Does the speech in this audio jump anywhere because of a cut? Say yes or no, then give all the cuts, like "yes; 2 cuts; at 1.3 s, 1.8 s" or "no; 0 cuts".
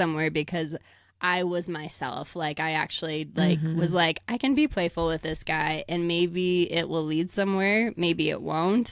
no; 0 cuts